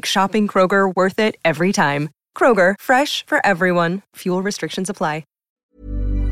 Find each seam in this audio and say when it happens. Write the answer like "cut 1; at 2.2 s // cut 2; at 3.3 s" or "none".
cut 1; at 5.4 s